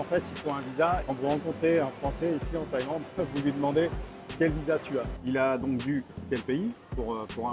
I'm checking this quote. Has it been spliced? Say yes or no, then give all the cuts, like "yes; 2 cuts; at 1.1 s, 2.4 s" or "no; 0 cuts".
yes; 3 cuts; at 1.0 s, 5.1 s, 6.2 s